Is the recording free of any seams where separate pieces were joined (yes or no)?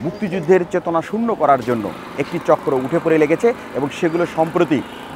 yes